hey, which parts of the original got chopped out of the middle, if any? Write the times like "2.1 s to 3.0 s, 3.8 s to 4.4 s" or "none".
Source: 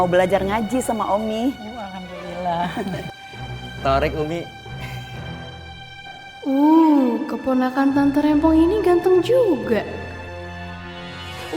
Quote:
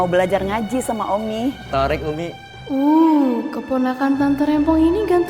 1.6 s to 3.7 s, 4.6 s to 6.2 s